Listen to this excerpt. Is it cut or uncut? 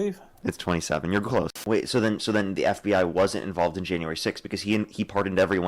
cut